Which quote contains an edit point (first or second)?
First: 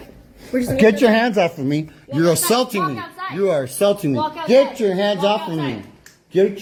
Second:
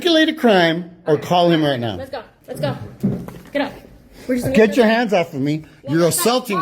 second